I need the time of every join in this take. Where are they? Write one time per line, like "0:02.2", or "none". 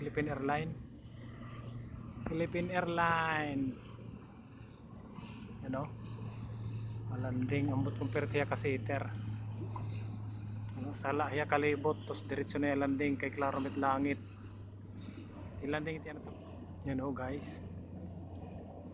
0:16.1